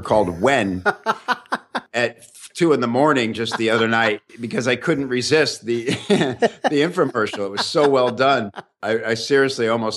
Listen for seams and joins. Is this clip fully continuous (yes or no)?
no